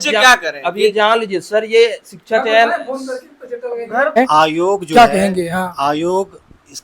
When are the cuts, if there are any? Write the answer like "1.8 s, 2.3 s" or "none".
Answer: 4.2 s